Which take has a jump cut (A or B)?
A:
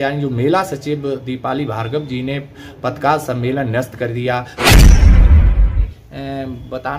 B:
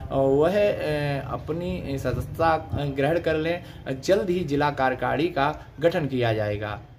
A